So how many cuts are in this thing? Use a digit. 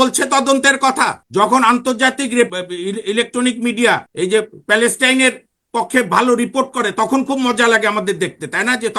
3